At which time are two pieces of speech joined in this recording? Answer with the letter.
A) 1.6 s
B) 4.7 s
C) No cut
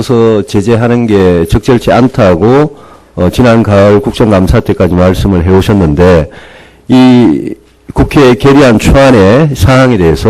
A